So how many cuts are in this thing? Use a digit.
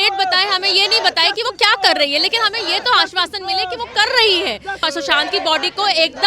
1